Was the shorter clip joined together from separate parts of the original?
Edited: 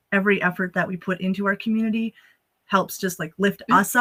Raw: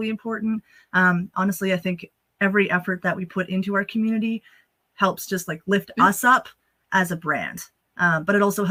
no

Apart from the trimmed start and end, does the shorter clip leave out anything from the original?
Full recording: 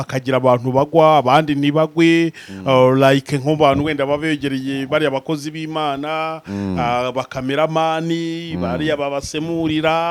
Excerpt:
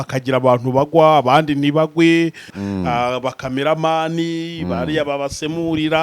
yes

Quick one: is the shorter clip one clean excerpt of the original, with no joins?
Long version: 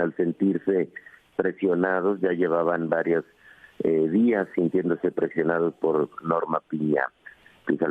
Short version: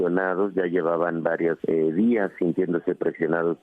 no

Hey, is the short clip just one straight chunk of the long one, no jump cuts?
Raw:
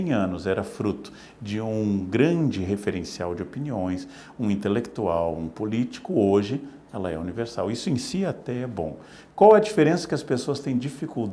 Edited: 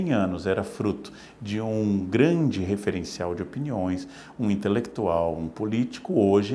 yes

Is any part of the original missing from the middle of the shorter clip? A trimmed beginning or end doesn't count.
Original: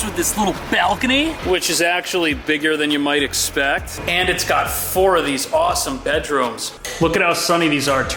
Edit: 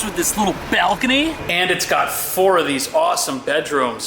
yes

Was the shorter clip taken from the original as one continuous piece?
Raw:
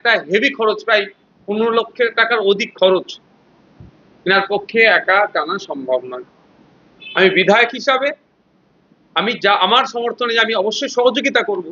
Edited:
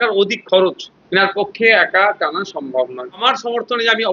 no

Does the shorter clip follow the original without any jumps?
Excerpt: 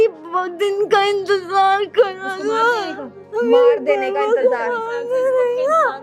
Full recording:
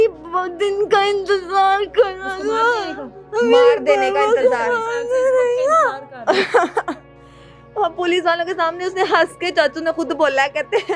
yes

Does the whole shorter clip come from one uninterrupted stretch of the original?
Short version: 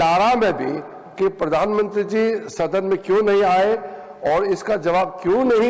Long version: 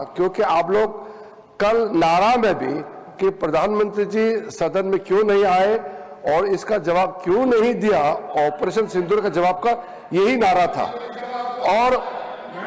yes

